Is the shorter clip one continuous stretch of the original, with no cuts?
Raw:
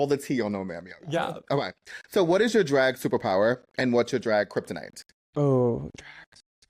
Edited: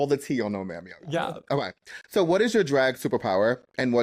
yes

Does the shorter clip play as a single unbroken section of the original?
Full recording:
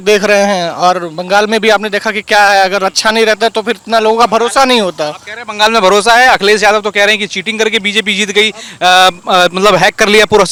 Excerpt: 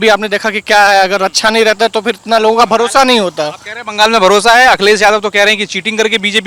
yes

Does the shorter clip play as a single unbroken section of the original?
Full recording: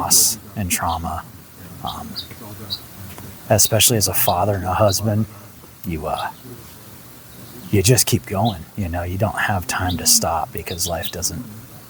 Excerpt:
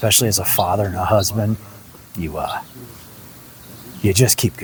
yes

